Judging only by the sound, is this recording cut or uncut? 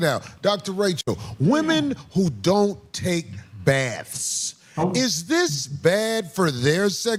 uncut